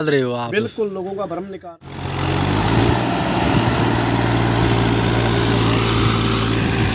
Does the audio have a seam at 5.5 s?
no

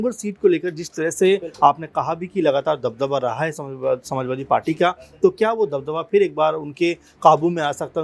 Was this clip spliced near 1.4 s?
no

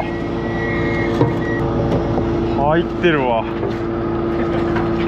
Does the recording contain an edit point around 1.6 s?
yes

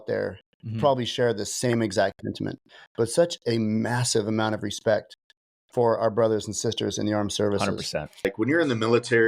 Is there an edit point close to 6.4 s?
no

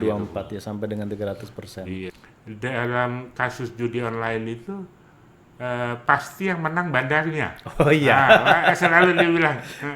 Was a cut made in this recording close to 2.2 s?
yes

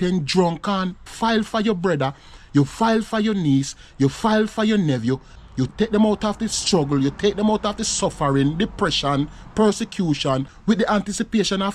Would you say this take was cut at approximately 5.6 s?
yes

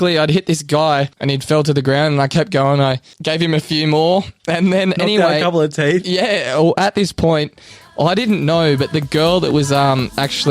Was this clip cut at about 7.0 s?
no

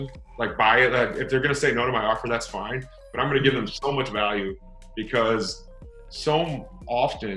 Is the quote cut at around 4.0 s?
no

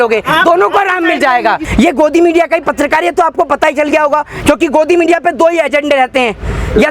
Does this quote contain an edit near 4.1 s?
no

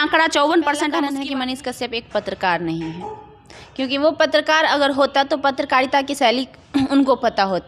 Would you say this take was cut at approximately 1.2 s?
yes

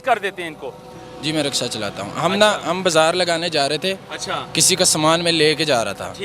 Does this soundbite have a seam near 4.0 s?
no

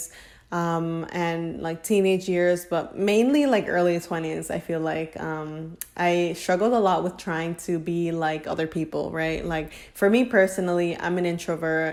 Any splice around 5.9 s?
no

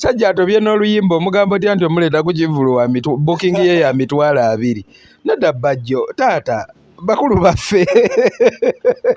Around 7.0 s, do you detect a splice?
no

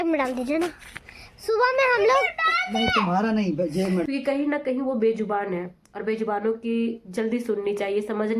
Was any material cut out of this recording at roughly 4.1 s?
yes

